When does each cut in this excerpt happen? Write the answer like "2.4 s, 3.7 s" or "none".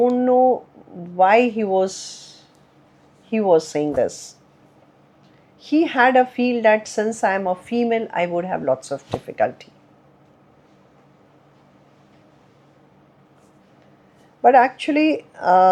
none

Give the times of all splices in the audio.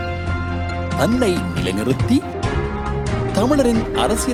none

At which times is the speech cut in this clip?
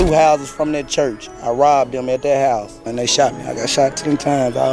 2.9 s

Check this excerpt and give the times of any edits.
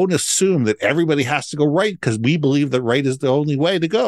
none

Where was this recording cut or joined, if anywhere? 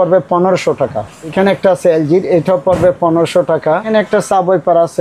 1.3 s, 3.8 s

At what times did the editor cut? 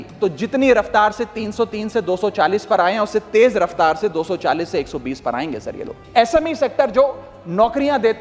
5.9 s

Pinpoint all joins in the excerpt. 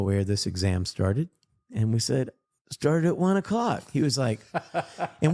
none

